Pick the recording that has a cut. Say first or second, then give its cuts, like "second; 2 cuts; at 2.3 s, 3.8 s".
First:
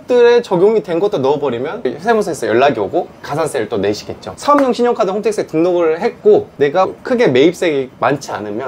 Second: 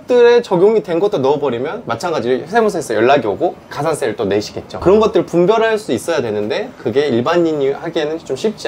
first; 2 cuts; at 1.9 s, 4.1 s